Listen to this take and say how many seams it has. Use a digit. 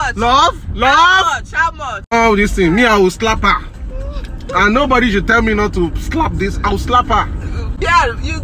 1